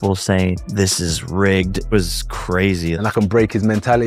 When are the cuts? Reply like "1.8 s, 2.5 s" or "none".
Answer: 3.0 s